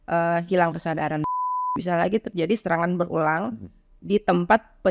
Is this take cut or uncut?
cut